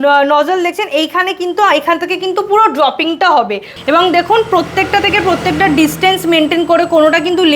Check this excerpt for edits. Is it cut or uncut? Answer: cut